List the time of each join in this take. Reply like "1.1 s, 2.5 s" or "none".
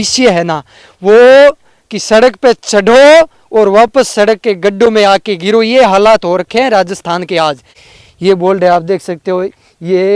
7.8 s